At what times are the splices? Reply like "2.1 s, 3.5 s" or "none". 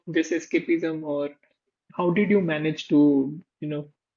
none